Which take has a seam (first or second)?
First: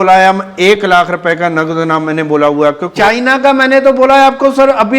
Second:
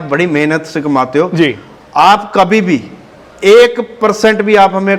first